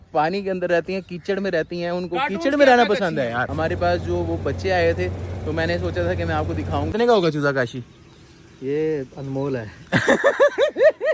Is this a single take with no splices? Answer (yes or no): no